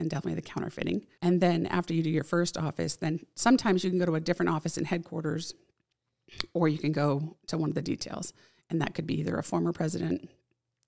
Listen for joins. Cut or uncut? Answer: cut